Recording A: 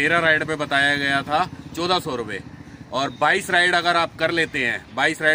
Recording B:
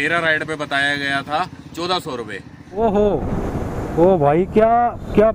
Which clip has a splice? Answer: B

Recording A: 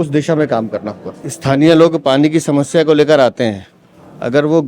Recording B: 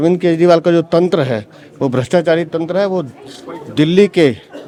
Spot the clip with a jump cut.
A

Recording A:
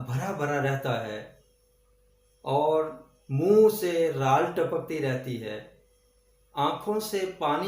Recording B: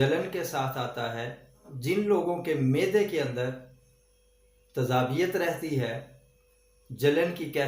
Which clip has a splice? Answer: B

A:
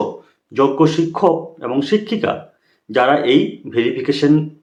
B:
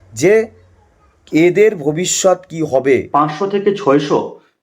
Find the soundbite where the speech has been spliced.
B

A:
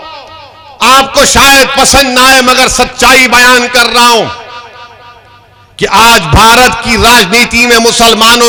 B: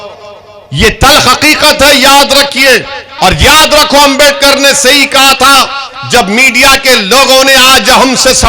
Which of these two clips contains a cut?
B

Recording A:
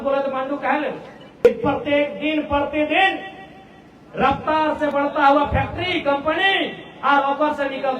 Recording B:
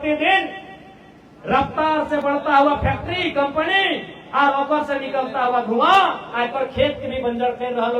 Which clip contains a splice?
A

